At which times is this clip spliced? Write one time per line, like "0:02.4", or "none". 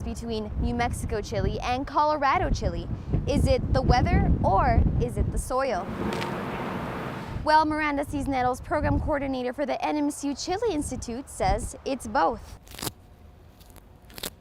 0:12.6